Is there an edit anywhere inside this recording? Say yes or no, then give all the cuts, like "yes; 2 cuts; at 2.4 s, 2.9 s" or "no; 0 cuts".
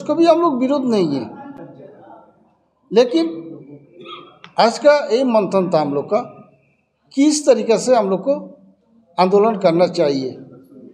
no; 0 cuts